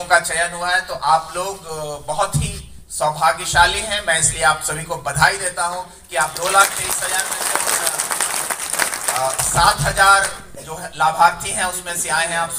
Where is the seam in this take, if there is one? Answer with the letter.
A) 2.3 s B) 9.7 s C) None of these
C